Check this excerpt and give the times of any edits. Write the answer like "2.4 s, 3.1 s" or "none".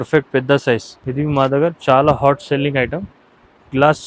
1.0 s